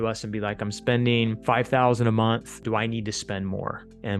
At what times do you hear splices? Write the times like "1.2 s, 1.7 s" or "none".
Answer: 1.4 s, 2.6 s